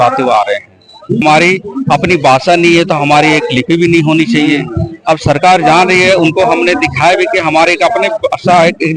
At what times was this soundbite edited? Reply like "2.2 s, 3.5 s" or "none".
1.2 s